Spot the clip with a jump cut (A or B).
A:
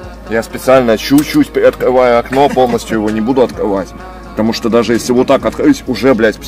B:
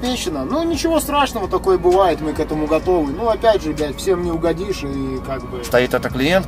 B